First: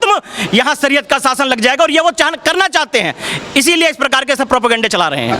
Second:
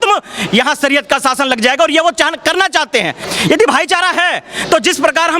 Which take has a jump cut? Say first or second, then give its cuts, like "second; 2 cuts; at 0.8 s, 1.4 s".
second; 1 cut; at 3.3 s